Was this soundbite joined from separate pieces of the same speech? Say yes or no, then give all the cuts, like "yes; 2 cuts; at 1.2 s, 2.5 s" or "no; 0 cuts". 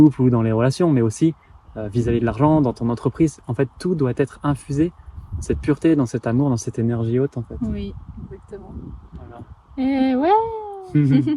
no; 0 cuts